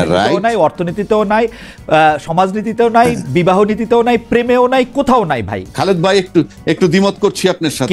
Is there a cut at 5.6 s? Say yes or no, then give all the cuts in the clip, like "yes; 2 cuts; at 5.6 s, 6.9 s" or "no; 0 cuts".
yes; 1 cut; at 5.6 s